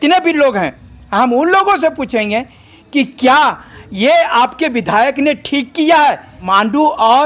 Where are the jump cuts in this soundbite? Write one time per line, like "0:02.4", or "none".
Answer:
0:06.3